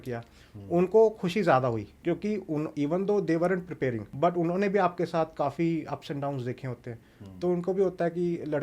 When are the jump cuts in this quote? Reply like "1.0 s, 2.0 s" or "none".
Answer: 1.9 s, 4.1 s